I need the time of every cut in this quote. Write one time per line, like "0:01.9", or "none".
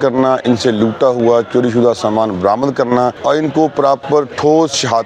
0:03.2